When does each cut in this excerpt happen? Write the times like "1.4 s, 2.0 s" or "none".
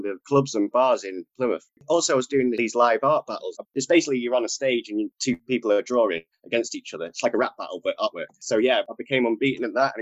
2.6 s, 3.6 s, 5.4 s, 8.3 s